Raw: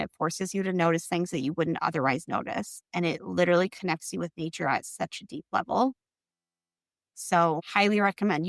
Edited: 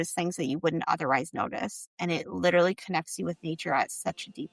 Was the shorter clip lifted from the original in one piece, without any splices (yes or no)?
yes